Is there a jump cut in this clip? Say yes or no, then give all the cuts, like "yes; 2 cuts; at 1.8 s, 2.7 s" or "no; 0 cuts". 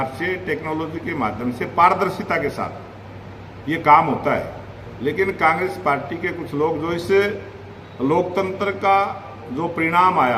no; 0 cuts